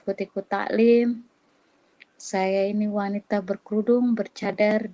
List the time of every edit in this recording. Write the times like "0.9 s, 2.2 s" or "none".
none